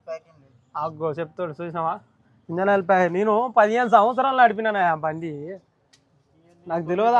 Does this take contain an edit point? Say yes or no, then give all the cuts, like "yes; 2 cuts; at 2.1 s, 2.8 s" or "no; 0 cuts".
no; 0 cuts